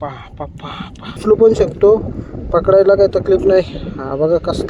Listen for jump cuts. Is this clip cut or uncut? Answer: cut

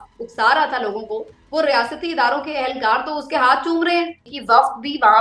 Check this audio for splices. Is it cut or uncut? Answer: cut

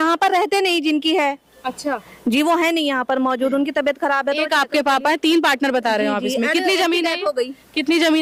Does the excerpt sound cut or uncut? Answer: uncut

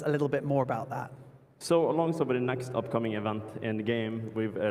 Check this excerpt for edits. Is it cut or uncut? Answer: uncut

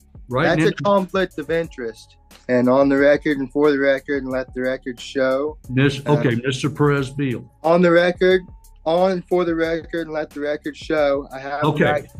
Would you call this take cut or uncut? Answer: cut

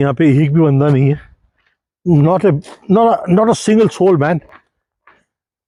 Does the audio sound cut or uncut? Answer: uncut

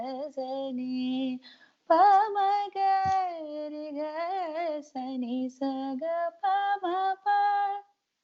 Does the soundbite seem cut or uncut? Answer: uncut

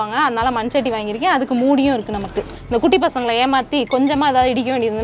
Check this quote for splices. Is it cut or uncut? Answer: cut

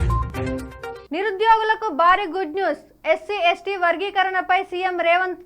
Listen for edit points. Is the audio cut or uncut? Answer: cut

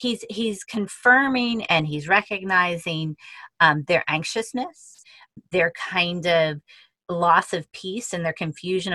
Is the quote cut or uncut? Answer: cut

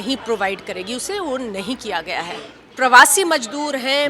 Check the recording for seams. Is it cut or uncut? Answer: cut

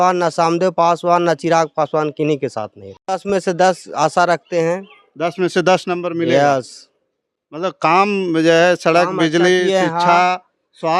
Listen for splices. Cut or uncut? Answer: uncut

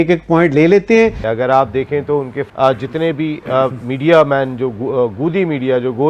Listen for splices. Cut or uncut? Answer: cut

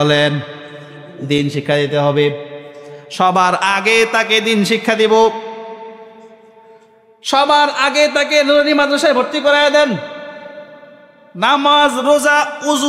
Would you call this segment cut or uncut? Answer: uncut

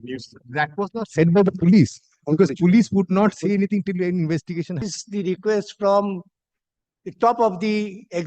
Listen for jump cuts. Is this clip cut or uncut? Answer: cut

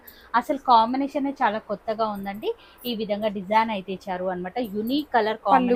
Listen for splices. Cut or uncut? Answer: uncut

